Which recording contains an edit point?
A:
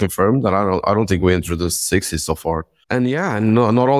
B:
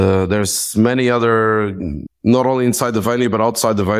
A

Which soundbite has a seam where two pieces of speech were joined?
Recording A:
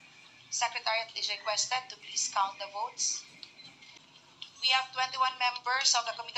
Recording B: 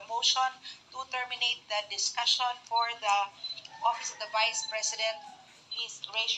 A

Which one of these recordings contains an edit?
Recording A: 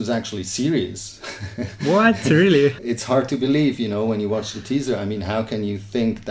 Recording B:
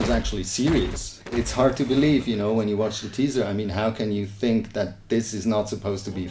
B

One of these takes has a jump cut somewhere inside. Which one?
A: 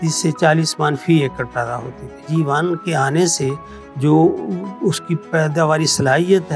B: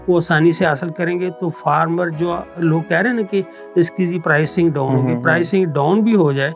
A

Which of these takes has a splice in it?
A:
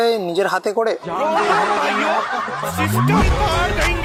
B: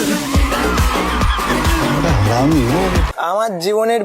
B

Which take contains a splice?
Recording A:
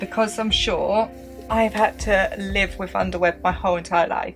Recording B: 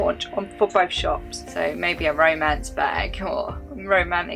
B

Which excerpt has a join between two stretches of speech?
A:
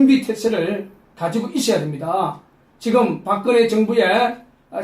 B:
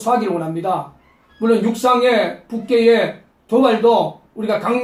A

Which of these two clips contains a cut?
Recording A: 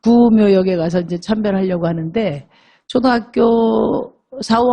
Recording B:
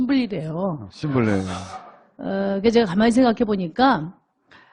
A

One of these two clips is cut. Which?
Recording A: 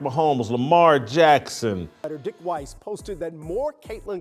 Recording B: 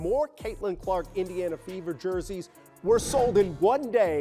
A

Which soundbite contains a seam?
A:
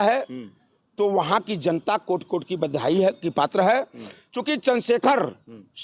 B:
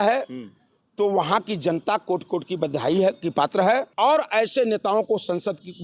B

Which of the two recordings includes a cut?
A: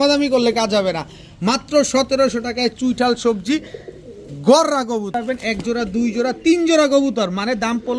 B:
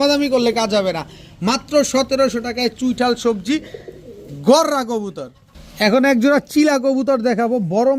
A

